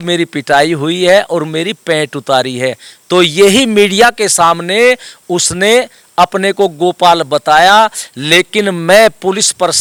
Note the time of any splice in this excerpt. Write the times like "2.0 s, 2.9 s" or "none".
none